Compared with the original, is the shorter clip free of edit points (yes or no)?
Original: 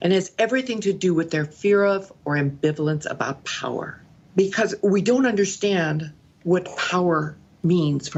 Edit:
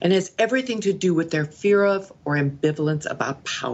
yes